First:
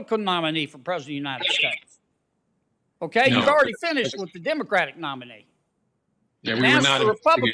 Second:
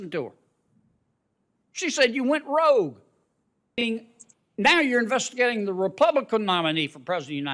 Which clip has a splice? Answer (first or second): second